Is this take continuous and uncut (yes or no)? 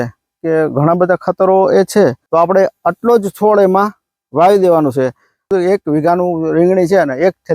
no